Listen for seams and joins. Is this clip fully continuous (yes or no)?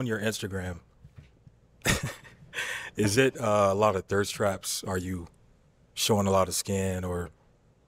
yes